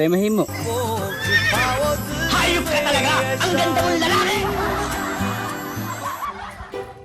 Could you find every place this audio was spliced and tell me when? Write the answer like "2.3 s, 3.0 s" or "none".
none